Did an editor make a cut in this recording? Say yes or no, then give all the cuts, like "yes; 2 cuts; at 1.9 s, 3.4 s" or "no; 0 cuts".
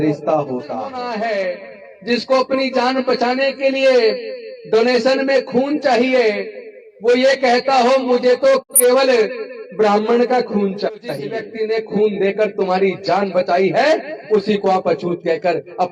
yes; 2 cuts; at 1.0 s, 11.4 s